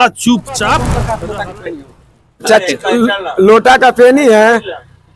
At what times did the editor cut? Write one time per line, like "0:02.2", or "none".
0:01.0